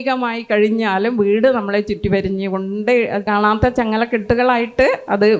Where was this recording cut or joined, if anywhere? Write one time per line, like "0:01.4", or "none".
0:03.3